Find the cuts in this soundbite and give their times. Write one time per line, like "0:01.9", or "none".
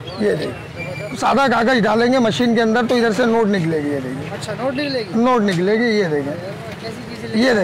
0:01.2